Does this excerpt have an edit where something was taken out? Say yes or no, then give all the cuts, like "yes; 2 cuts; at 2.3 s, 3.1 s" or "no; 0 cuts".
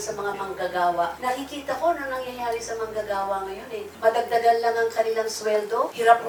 no; 0 cuts